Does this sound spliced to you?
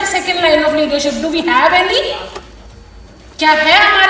yes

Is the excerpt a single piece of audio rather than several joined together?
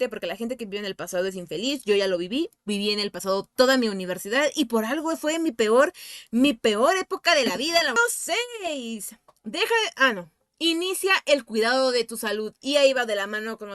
no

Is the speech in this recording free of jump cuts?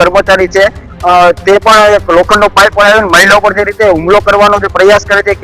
yes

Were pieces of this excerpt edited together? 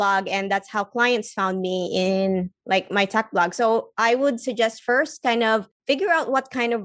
yes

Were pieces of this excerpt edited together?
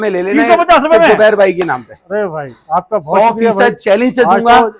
no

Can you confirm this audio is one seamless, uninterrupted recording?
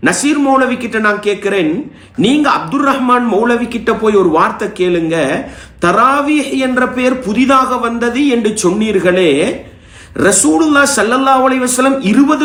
yes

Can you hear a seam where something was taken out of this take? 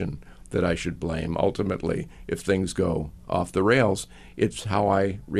no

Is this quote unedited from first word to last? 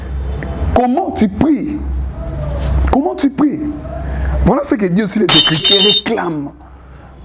no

